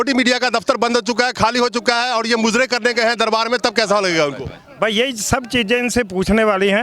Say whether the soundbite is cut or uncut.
uncut